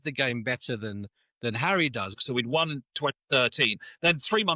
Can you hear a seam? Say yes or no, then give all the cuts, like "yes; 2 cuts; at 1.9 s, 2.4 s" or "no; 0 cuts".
yes; 1 cut; at 2.1 s